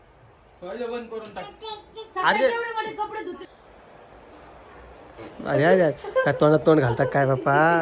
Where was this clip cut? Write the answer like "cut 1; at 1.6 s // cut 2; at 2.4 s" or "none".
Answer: cut 1; at 3.4 s